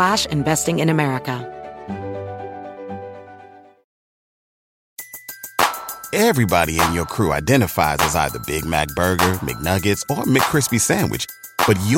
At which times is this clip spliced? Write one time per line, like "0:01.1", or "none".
0:01.4